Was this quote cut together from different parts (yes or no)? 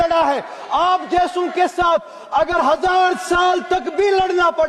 no